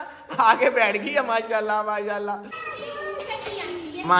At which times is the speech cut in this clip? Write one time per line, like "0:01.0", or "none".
0:02.6